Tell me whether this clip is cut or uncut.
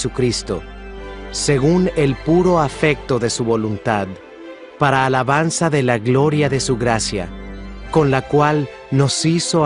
cut